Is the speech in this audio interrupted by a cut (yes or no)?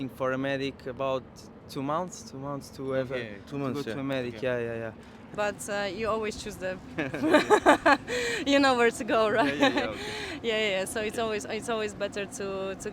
yes